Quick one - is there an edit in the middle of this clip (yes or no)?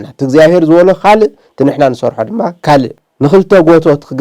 yes